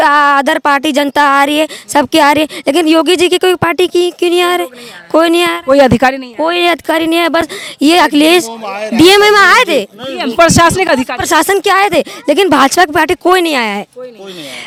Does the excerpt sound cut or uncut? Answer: uncut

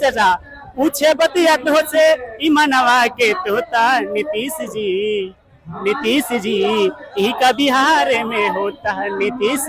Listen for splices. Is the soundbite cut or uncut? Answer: uncut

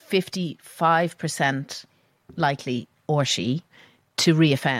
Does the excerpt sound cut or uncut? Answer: cut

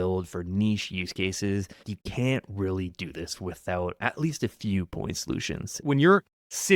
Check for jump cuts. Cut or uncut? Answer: cut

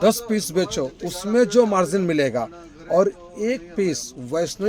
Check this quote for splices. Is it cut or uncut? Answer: uncut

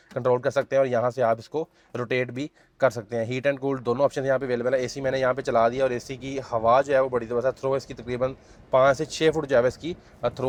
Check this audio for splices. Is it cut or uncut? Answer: uncut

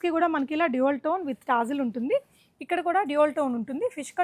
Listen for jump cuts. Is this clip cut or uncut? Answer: uncut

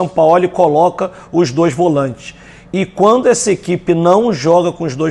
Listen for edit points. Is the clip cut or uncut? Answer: uncut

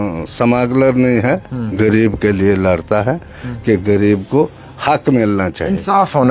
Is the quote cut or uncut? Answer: uncut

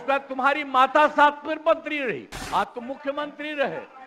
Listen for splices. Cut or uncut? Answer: cut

